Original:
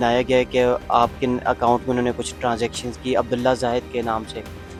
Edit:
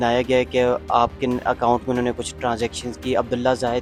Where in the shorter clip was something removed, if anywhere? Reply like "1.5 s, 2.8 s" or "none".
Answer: none